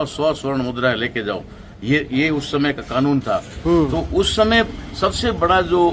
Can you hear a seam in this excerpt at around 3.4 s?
no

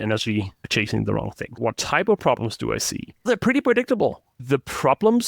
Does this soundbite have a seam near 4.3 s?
yes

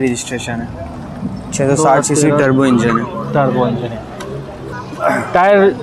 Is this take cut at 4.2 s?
yes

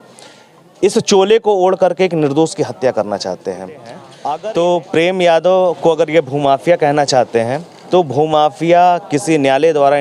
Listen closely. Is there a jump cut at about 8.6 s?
no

